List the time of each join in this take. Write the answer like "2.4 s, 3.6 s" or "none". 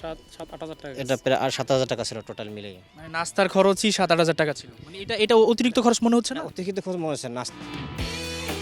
none

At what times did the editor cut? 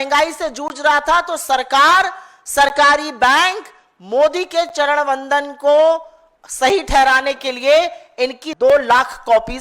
8.4 s

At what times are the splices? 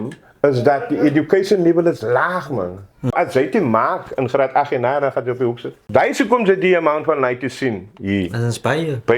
3.1 s, 5.7 s

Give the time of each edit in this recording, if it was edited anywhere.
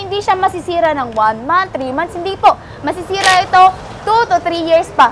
none

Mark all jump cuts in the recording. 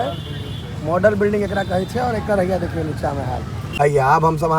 3.6 s

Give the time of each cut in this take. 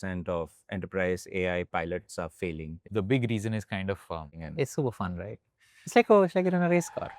2.8 s, 4.5 s

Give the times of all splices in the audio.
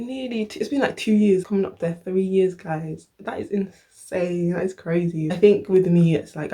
5.3 s

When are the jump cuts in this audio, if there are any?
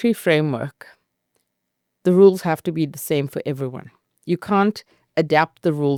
none

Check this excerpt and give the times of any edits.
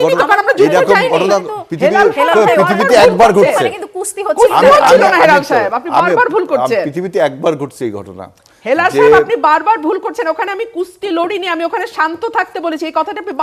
none

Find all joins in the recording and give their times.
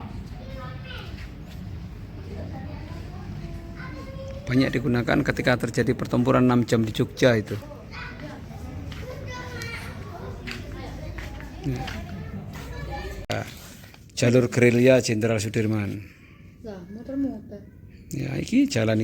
13.3 s

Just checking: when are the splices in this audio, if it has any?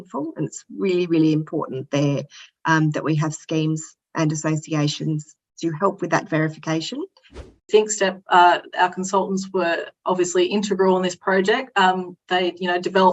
7.6 s

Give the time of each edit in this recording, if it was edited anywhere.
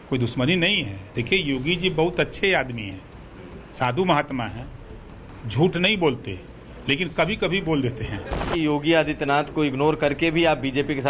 8.5 s

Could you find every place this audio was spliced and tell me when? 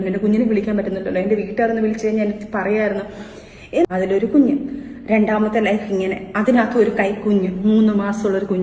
3.9 s

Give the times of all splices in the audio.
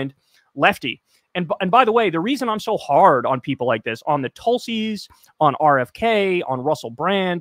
none

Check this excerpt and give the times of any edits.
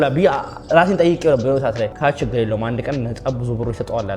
1.9 s

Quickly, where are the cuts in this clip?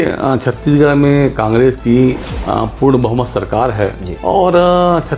2.3 s, 4.1 s

